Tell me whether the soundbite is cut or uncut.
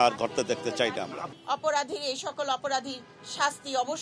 cut